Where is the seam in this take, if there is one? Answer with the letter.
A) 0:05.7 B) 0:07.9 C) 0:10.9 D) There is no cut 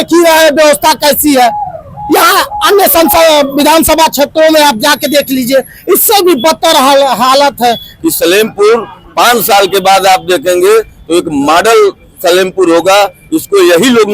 B